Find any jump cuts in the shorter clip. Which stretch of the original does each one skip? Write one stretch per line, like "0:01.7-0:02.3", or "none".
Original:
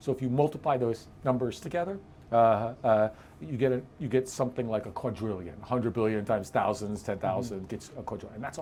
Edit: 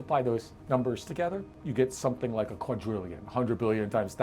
0:02.1-0:03.9